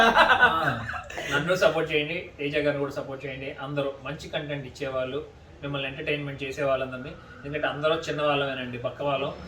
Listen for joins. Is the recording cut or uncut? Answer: cut